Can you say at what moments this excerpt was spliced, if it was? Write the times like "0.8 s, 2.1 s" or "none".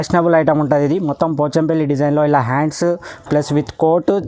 none